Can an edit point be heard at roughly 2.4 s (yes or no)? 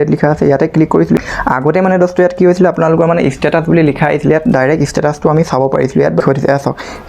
no